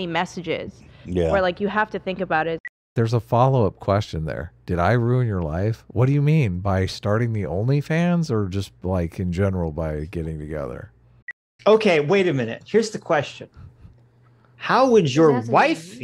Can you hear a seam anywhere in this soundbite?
yes; 2 cuts; at 2.9 s, 11.5 s

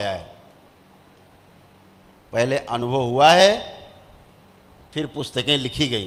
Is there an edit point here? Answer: no; 0 cuts

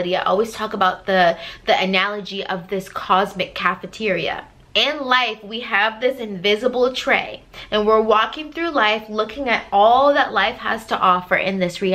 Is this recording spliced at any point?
no; 0 cuts

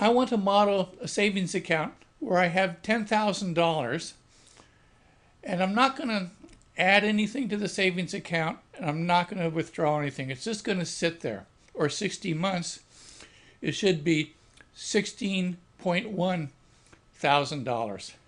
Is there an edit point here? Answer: no; 0 cuts

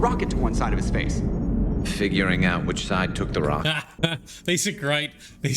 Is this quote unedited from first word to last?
no; 1 cut; at 3.9 s

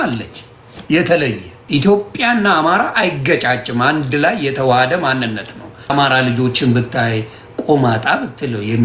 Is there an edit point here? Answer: yes; 2 cuts; at 1.5 s, 5.9 s

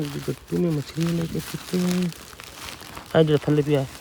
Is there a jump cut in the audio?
no; 0 cuts

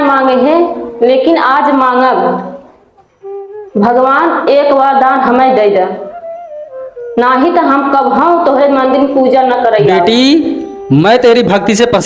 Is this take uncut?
no; 1 cut; at 10.0 s

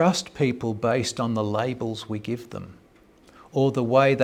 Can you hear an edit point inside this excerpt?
no; 0 cuts

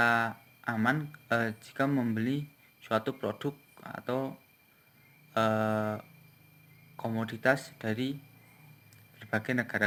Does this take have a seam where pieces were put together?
no; 0 cuts

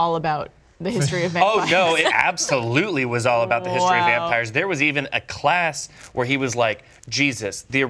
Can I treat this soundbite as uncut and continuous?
no; 1 cut; at 2.0 s

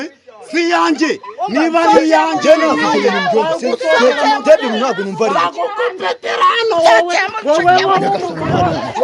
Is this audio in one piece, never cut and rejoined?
yes; 0 cuts

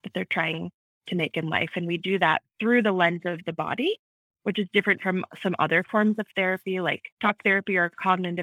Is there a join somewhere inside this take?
yes; 1 cut; at 7.1 s

